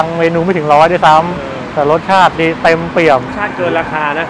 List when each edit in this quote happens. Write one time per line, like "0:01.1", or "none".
0:03.3